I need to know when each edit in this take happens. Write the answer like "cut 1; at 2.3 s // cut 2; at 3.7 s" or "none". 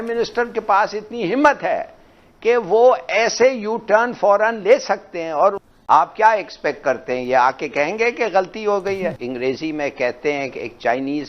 cut 1; at 5.7 s // cut 2; at 9.2 s